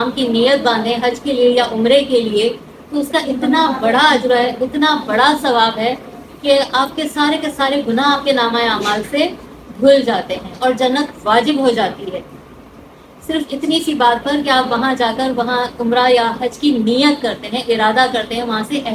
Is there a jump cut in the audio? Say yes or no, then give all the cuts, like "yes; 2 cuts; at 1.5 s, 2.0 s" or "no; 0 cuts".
no; 0 cuts